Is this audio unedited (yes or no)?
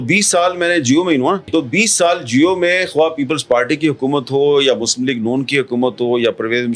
no